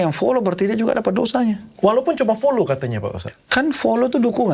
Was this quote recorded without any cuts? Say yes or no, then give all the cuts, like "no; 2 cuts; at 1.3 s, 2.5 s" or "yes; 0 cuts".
yes; 0 cuts